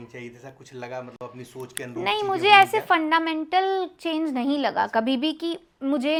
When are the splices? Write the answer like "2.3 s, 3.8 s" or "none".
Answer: none